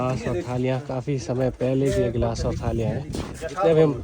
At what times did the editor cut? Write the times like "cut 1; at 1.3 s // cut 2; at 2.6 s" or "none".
none